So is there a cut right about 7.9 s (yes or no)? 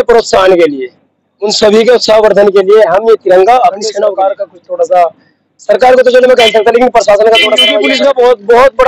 yes